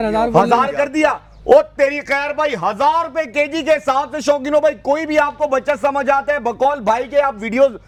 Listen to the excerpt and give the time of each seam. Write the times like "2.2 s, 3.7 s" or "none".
none